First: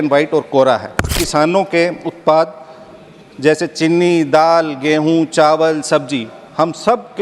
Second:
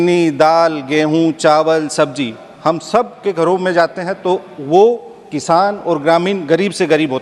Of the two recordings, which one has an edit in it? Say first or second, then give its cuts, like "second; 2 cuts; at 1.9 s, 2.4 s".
first; 1 cut; at 1.1 s